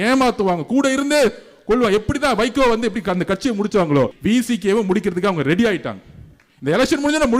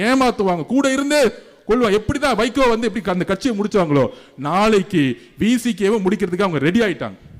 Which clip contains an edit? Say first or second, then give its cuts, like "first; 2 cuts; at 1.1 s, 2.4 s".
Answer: first; 1 cut; at 4.2 s